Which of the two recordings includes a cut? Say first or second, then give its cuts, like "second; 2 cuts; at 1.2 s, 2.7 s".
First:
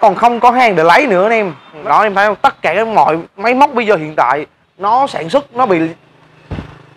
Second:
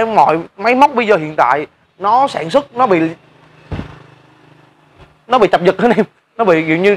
first; 1 cut; at 1.8 s